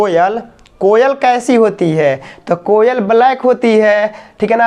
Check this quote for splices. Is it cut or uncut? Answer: uncut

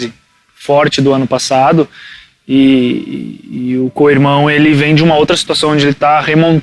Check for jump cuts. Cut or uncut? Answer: uncut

